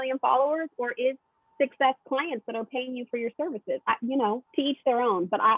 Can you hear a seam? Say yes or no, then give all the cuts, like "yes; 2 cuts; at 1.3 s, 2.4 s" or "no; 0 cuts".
yes; 1 cut; at 4.4 s